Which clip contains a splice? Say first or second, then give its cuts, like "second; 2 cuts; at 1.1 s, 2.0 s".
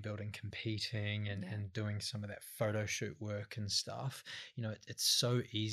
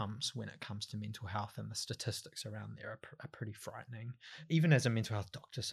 second; 1 cut; at 4.4 s